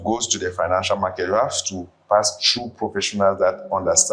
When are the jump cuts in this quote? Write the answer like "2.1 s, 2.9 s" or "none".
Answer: none